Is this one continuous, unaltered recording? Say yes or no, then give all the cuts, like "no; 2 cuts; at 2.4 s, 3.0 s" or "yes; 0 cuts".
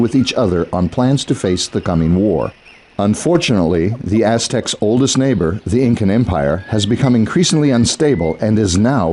no; 1 cut; at 7.9 s